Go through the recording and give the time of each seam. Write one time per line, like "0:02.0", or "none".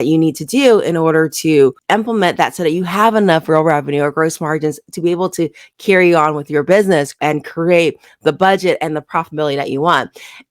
0:07.1